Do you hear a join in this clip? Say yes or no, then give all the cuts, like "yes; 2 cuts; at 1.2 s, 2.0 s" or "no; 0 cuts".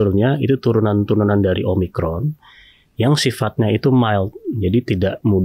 no; 0 cuts